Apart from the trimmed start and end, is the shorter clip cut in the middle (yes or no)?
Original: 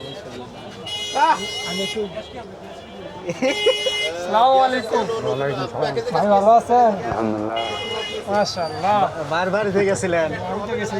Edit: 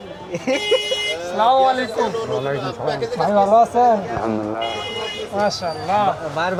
no